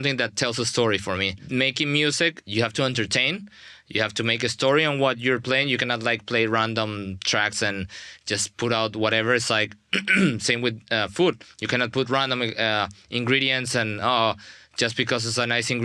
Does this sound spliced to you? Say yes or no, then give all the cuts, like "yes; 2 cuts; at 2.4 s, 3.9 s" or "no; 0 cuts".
yes; 2 cuts; at 1.4 s, 2.4 s